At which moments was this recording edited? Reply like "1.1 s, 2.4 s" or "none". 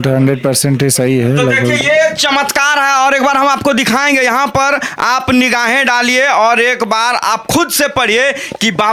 none